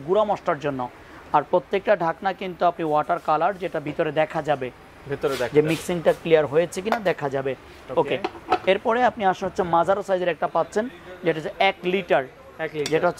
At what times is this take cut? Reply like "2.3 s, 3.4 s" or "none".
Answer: none